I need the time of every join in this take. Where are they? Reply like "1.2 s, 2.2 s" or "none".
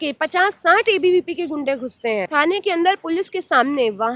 2.3 s